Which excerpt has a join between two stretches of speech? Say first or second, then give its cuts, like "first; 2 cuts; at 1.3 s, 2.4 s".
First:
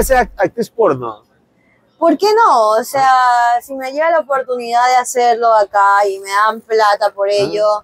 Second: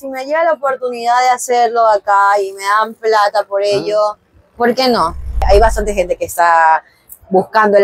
second; 1 cut; at 5.5 s